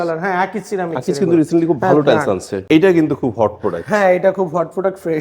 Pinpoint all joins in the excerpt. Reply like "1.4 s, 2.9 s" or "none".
2.6 s